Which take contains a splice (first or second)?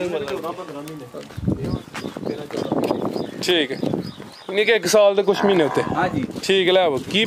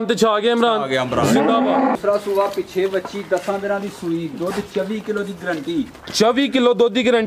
second